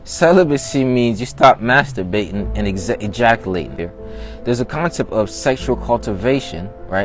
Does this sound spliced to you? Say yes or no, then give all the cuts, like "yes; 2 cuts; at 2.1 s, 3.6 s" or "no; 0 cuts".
yes; 1 cut; at 3.7 s